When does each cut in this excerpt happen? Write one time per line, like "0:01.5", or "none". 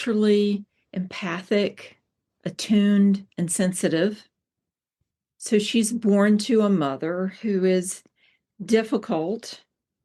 none